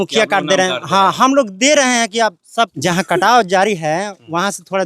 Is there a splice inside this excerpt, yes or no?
yes